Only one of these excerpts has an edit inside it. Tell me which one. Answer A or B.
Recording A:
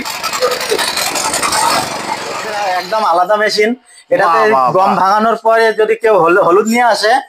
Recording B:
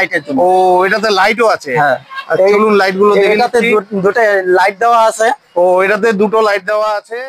A